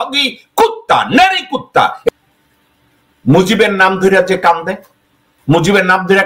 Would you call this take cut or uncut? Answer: cut